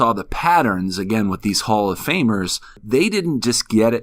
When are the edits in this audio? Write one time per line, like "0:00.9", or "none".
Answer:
0:02.8